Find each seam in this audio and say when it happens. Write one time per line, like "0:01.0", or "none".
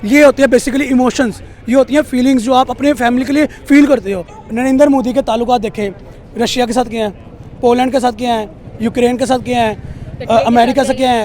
0:04.4